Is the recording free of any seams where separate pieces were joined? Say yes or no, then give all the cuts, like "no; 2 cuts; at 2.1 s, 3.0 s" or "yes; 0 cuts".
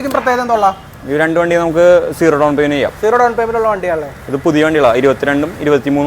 yes; 0 cuts